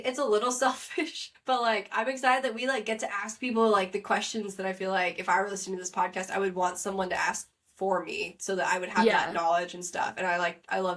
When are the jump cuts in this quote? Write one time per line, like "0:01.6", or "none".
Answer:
0:01.2